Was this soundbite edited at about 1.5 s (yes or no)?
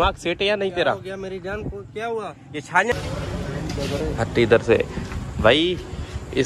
no